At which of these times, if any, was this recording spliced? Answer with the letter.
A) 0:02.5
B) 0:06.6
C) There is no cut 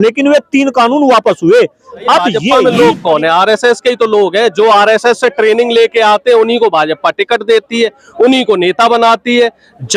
A